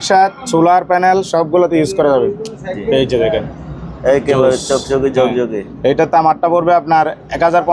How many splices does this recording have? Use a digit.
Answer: 0